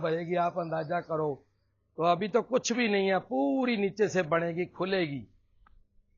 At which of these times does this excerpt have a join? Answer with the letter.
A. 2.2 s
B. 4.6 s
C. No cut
C